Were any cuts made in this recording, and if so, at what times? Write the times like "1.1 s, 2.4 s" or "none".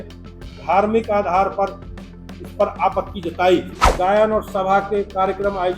3.8 s